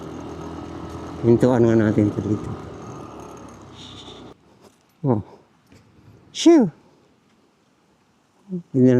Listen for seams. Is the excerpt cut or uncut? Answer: cut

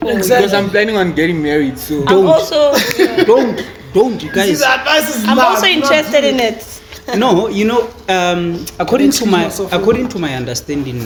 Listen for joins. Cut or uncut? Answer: uncut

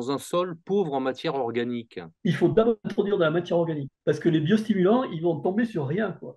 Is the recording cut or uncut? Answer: cut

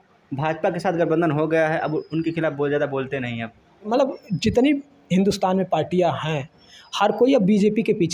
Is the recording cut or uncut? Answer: cut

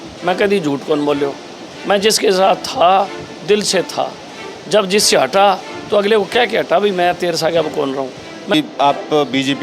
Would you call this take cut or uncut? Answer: cut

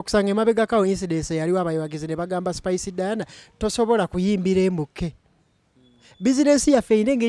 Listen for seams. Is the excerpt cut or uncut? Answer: uncut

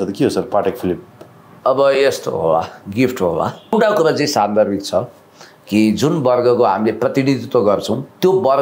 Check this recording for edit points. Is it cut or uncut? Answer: cut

